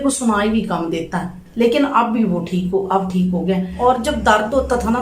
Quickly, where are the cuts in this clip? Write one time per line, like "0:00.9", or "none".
0:03.7